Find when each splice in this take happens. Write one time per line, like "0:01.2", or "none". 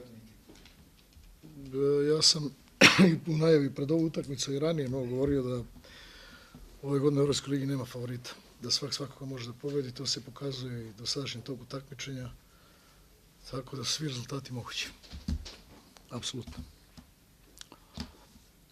0:05.6